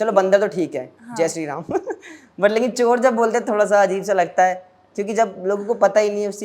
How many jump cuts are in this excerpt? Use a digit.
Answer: 0